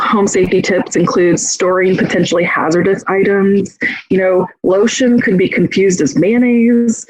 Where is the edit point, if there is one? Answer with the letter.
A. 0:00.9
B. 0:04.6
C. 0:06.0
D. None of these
D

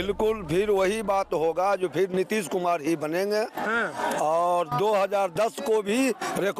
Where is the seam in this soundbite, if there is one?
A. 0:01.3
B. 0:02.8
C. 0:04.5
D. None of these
D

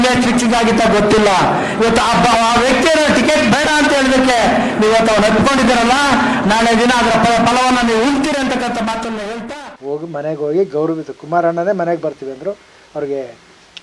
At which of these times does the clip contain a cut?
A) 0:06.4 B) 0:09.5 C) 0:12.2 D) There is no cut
B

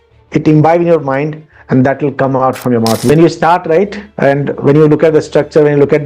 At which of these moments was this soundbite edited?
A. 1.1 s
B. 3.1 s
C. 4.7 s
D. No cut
B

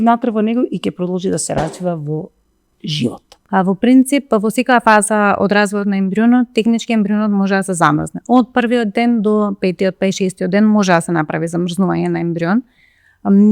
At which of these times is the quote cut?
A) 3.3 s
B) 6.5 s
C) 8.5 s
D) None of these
A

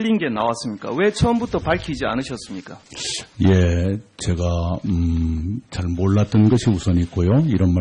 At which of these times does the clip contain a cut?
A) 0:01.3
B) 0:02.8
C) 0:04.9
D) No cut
D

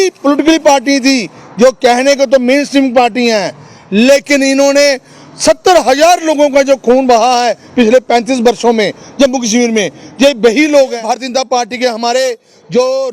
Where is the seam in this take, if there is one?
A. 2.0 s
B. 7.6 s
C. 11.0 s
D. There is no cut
C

